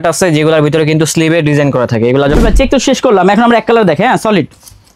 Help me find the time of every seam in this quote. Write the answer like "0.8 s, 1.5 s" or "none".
2.4 s